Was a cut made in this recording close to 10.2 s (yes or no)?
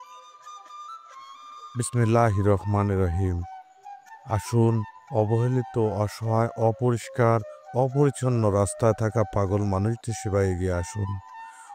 no